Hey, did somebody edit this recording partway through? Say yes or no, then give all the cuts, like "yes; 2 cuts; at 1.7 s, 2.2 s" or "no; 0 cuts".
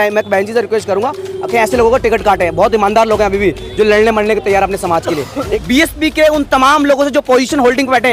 yes; 1 cut; at 5.6 s